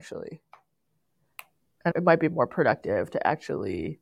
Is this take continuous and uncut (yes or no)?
no